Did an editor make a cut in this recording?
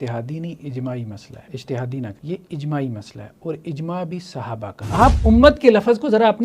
yes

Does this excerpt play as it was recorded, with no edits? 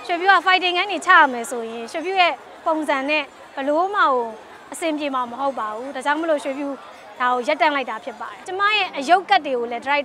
no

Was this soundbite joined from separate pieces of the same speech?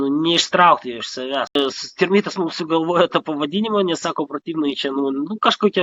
yes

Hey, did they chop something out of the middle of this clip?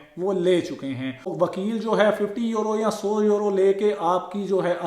yes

